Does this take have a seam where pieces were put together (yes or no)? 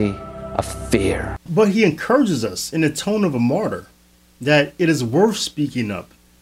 no